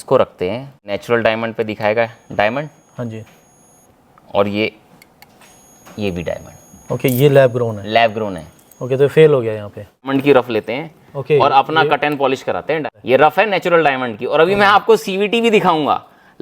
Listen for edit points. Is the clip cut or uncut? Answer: cut